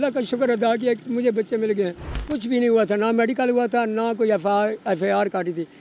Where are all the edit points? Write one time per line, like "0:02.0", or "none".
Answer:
0:02.2